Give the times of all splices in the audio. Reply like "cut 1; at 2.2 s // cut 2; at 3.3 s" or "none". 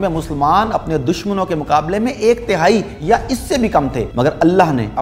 cut 1; at 4.0 s